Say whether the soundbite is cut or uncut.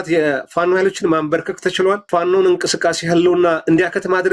cut